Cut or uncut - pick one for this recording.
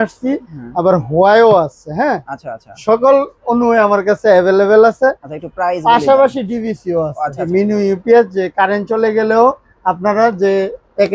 cut